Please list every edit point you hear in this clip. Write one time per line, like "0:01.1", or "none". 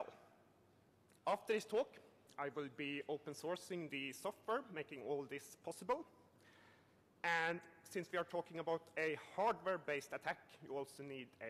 0:05.1